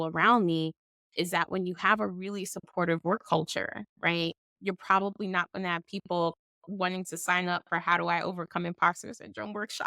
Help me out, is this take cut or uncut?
cut